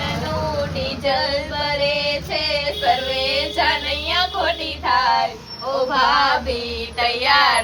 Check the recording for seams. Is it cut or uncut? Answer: uncut